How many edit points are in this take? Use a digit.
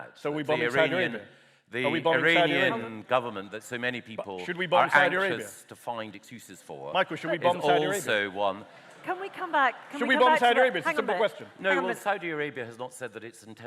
0